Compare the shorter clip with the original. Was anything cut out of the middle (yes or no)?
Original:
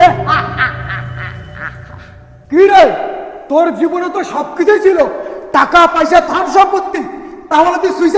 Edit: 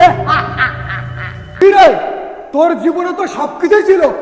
yes